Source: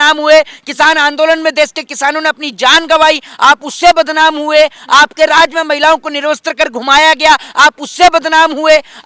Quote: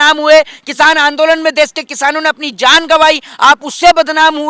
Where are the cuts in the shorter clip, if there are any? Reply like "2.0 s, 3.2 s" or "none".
none